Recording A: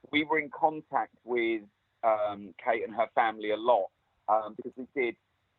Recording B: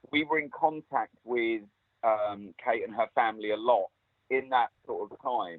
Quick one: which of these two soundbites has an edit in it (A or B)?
A